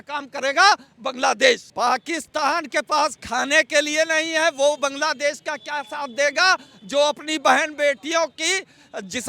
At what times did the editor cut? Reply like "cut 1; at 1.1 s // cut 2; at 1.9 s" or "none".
cut 1; at 1.7 s